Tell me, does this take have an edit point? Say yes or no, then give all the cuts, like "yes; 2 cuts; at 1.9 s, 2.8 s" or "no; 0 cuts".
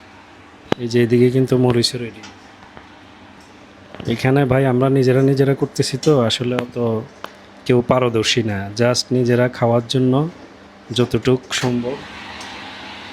no; 0 cuts